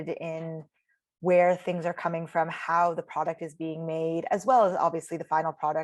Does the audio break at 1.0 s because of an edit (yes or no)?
no